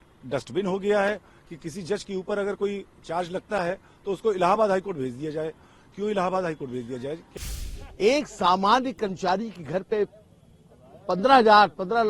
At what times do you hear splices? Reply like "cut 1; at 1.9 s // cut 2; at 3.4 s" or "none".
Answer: cut 1; at 7.3 s